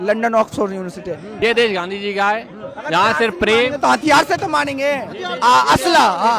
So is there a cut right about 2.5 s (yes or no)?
no